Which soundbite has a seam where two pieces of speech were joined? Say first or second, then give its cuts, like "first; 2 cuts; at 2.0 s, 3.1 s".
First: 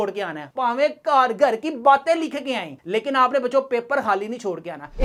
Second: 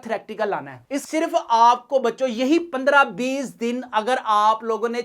second; 1 cut; at 1.0 s